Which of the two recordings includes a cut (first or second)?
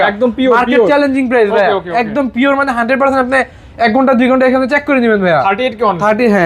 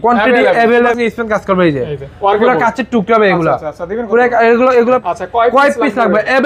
second